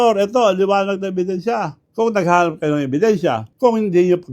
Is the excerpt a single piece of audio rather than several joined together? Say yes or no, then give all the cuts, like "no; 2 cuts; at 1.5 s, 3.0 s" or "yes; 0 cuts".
no; 2 cuts; at 1.8 s, 3.5 s